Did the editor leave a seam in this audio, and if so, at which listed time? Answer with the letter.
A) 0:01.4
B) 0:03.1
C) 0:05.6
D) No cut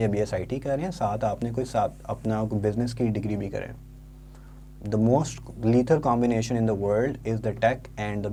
D